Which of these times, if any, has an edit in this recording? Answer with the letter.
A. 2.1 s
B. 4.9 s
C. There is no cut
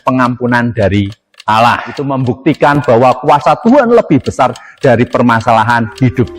A